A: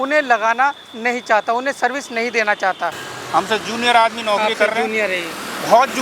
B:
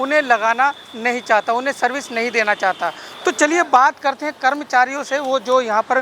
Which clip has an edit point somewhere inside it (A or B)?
A